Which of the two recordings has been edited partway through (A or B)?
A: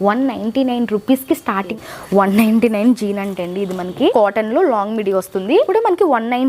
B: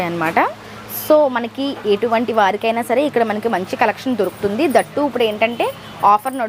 A